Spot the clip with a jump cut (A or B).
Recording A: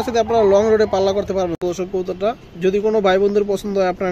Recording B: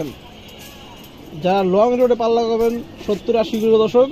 A